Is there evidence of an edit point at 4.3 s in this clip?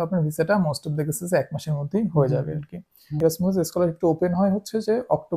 no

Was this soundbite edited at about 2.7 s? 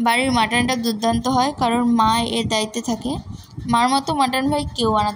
no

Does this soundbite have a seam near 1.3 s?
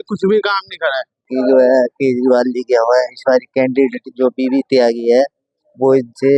yes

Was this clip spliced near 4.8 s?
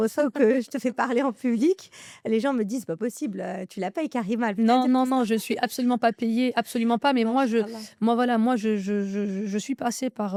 no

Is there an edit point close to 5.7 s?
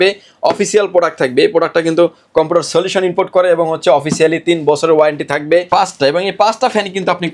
yes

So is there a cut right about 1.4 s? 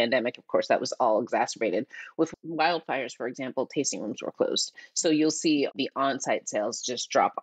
no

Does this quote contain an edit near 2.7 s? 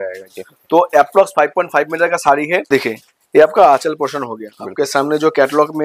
yes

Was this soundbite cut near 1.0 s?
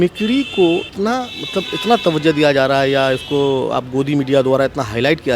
yes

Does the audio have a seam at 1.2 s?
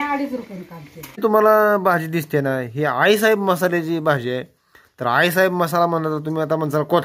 yes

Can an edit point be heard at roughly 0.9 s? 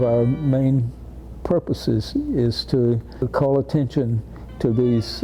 no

